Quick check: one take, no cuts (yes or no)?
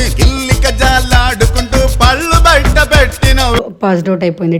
no